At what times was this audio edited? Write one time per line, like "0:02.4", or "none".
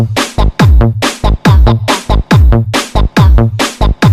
none